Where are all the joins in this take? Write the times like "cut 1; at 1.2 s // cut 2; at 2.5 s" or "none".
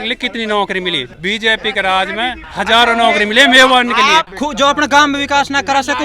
cut 1; at 1.1 s // cut 2; at 2.4 s // cut 3; at 4.3 s